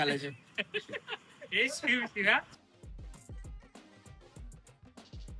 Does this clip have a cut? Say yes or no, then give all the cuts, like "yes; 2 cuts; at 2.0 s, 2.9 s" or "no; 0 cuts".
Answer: yes; 1 cut; at 2.5 s